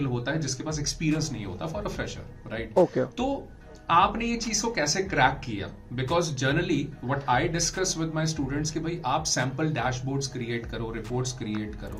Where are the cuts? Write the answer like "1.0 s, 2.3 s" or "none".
none